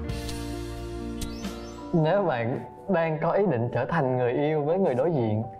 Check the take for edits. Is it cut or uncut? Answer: cut